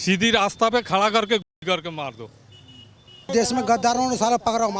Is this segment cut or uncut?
cut